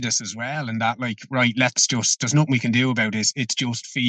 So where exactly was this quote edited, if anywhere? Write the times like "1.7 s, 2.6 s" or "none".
none

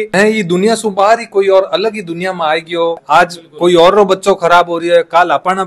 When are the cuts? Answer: 3.0 s

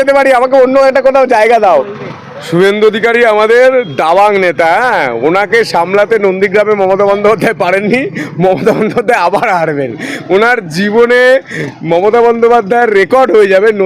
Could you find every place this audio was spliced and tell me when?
1.6 s

